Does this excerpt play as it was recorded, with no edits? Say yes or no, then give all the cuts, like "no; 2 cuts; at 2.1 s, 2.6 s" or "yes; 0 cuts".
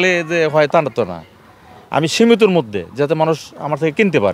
yes; 0 cuts